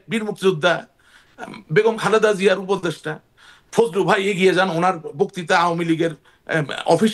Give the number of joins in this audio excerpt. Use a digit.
0